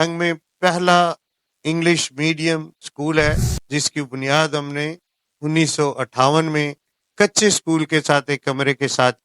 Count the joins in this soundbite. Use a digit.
1